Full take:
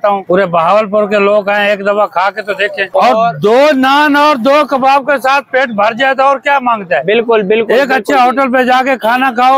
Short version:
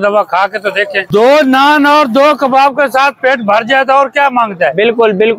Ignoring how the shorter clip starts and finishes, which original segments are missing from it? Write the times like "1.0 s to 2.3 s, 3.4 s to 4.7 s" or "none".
2.9 s to 3.4 s